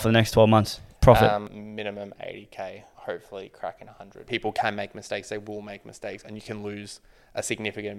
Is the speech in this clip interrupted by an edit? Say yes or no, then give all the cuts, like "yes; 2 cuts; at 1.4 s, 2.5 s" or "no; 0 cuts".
yes; 3 cuts; at 1.5 s, 2.9 s, 4.2 s